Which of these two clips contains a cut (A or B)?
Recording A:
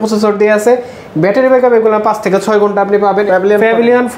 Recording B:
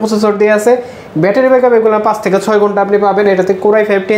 A